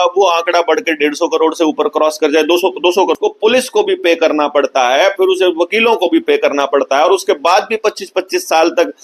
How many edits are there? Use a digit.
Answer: 1